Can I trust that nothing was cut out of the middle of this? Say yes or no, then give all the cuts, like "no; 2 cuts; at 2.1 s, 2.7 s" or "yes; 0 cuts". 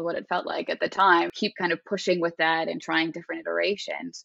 no; 1 cut; at 1.4 s